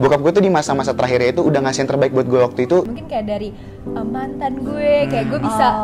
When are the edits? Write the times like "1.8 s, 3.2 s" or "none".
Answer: 3.0 s